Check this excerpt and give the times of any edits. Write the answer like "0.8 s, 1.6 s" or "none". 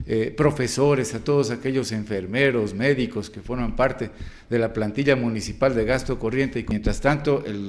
6.7 s